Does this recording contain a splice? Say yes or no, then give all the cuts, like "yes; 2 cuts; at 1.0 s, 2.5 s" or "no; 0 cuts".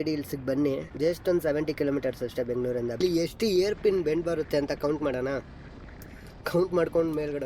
yes; 2 cuts; at 0.9 s, 3.0 s